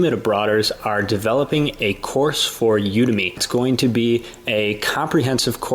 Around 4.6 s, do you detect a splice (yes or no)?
no